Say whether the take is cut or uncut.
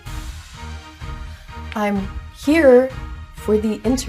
cut